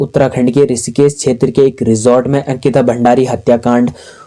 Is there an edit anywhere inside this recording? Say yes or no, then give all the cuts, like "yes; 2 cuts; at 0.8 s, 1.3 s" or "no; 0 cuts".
no; 0 cuts